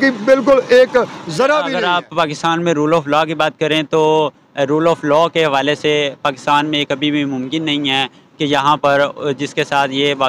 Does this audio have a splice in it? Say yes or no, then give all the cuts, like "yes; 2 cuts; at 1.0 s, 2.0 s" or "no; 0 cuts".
yes; 1 cut; at 1.7 s